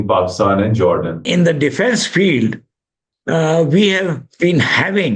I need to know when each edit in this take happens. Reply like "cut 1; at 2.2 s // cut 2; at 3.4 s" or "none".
cut 1; at 1.2 s